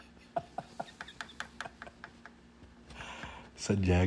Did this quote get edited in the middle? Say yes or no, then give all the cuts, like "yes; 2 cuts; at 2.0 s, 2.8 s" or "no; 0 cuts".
no; 0 cuts